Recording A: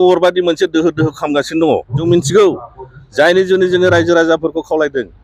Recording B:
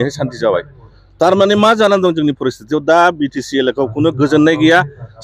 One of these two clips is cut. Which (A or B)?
A